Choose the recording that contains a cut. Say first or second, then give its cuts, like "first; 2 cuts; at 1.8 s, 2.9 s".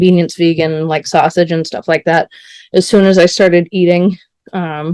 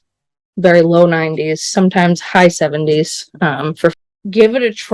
second; 1 cut; at 3.9 s